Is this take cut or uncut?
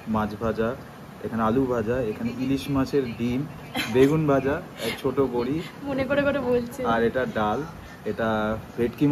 uncut